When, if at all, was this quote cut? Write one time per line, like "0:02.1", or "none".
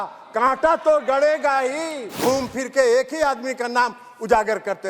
0:02.2